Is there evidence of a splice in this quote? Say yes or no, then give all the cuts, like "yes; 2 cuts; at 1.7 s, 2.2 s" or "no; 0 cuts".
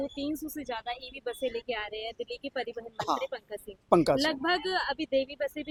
no; 0 cuts